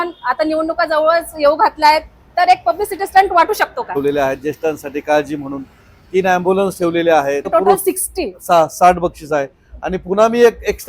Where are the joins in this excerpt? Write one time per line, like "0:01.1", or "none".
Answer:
0:03.9
0:07.5